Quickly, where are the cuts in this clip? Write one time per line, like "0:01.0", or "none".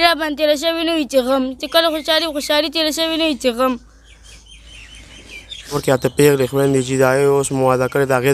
0:05.8